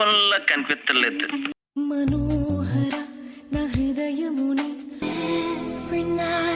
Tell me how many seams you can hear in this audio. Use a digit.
1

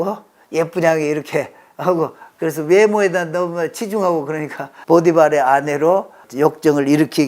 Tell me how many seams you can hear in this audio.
2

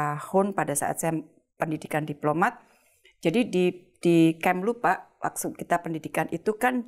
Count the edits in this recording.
0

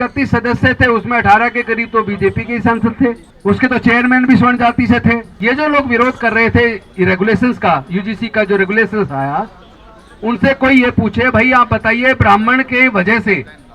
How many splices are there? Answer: 2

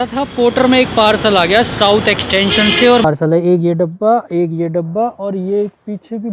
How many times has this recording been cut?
1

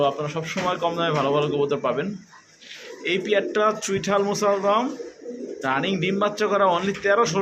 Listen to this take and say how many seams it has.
0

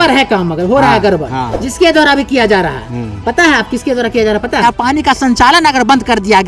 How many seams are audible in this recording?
1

